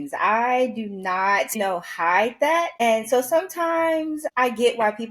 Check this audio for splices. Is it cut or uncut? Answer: cut